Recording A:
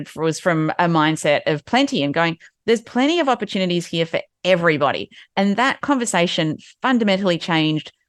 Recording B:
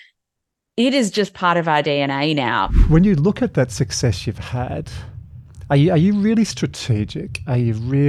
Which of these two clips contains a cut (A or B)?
B